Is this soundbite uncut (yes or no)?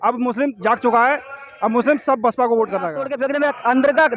no